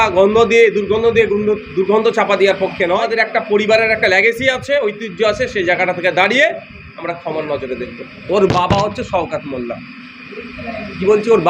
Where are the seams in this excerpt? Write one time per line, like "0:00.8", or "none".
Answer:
0:03.0
0:08.1